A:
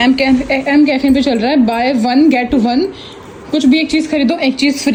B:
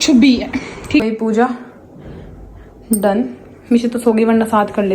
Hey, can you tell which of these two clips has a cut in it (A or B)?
B